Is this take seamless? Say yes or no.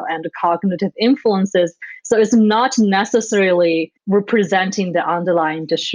no